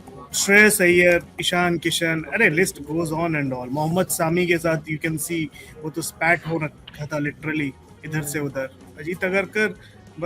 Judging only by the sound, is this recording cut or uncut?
cut